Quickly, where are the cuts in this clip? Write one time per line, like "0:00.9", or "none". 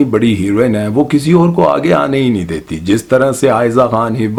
none